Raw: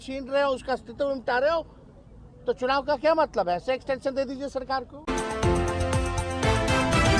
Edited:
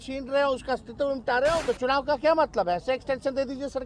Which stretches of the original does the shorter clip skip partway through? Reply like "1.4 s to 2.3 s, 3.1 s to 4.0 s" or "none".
1.6 s to 2.4 s